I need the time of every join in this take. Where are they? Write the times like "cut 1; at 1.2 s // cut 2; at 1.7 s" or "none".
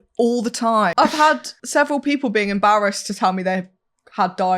cut 1; at 0.9 s // cut 2; at 1.5 s

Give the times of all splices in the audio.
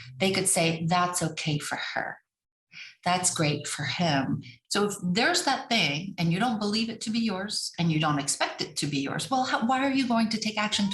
cut 1; at 4.6 s

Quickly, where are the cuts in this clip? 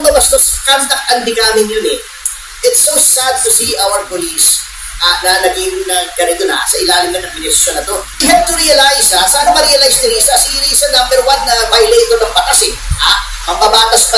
cut 1; at 8.1 s

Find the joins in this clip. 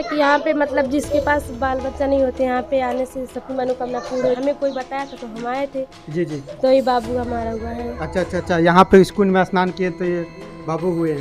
cut 1; at 4.4 s

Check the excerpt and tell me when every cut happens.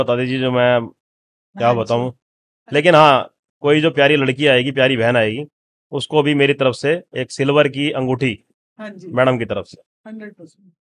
cut 1; at 2.6 s

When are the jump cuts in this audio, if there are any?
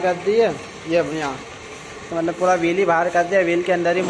none

